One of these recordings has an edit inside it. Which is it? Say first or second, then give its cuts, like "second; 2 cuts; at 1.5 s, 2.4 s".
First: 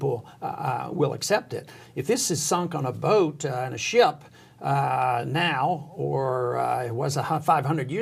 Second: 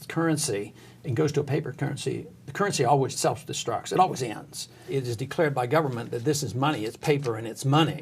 second; 2 cuts; at 3.1 s, 4.9 s